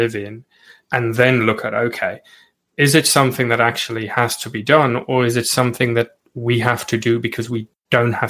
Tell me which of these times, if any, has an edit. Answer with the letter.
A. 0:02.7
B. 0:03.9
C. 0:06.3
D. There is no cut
A